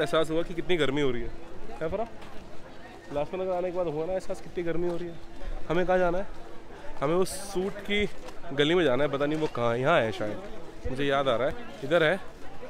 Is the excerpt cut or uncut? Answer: uncut